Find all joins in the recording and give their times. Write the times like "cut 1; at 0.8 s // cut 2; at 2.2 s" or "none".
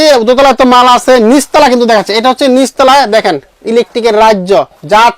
none